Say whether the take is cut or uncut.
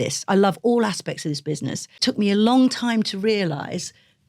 cut